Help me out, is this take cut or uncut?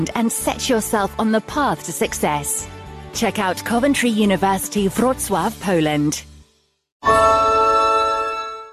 cut